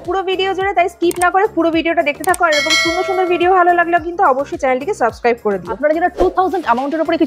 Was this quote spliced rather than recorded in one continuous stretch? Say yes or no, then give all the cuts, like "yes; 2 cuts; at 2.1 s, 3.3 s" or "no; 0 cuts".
yes; 1 cut; at 5.7 s